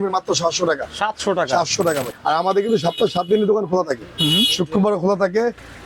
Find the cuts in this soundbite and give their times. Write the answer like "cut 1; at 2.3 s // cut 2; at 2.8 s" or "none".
cut 1; at 2.1 s